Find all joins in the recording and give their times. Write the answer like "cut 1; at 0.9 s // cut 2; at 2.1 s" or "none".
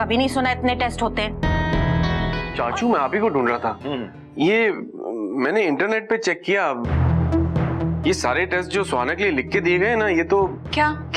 cut 1; at 2.4 s

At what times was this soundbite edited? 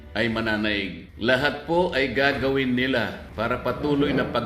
cut 1; at 1.0 s // cut 2; at 3.2 s

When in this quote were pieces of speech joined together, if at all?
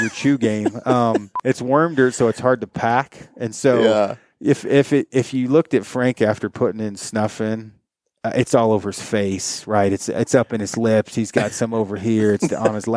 cut 1; at 1.3 s

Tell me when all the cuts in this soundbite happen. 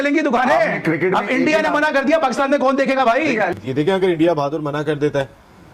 cut 1; at 3.5 s

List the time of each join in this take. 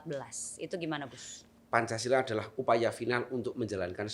cut 1; at 1.5 s

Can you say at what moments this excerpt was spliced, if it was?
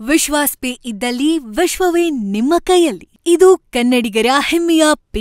none

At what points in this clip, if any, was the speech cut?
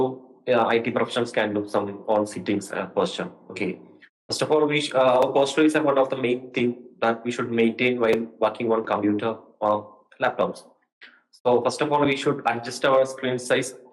none

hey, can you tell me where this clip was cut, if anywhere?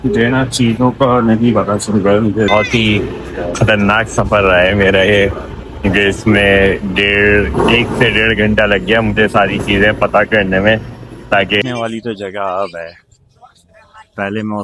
cut 1; at 2.5 s // cut 2; at 11.6 s

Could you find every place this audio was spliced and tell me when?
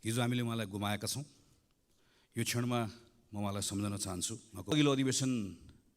cut 1; at 4.7 s

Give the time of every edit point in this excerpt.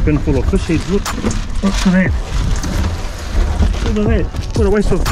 cut 1; at 1.1 s

